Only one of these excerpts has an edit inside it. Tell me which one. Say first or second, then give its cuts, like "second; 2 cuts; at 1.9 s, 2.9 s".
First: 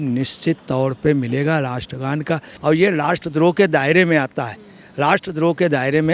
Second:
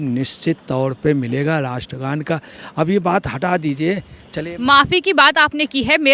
first; 1 cut; at 2.5 s